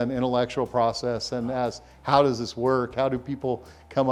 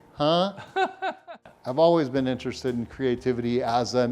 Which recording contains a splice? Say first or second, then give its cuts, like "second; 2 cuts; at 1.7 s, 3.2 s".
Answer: second; 1 cut; at 1.1 s